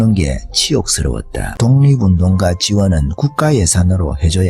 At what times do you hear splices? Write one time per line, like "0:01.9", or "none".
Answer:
0:01.5